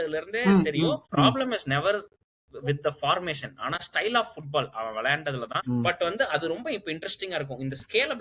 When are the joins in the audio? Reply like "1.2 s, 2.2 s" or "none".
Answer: 1.1 s, 5.5 s